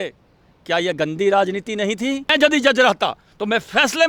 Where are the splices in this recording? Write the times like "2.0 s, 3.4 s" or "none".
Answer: 2.3 s